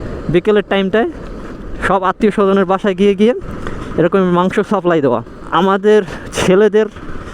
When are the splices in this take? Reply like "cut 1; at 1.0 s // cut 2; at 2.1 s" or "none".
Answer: cut 1; at 5.4 s